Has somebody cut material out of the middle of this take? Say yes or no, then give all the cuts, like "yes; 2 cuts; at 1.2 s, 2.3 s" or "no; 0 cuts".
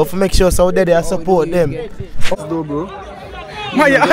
yes; 1 cut; at 2.3 s